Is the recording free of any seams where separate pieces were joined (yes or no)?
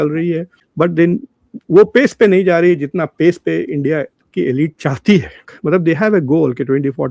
no